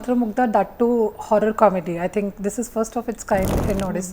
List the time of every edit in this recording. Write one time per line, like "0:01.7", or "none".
0:01.6